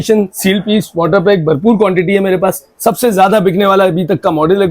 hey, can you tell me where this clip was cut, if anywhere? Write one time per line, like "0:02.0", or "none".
0:02.7